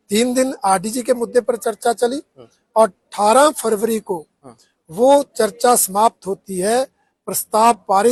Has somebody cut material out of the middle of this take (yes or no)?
no